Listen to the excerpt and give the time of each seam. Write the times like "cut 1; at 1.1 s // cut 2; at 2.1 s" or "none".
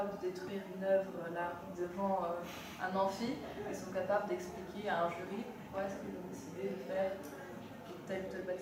none